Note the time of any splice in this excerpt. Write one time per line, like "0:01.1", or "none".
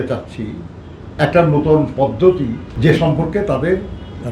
0:02.6